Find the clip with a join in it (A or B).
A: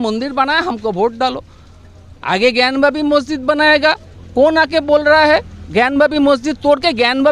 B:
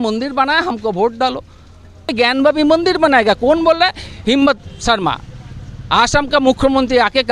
B